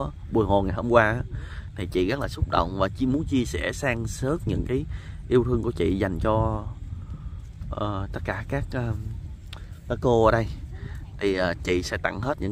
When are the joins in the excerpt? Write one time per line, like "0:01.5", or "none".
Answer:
none